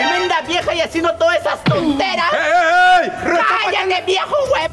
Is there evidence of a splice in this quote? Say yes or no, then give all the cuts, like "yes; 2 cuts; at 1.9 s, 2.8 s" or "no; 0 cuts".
no; 0 cuts